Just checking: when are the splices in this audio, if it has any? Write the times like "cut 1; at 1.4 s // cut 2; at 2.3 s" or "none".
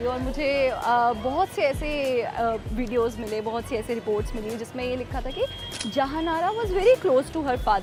none